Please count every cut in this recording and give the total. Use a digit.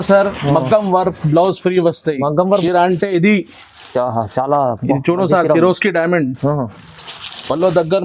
1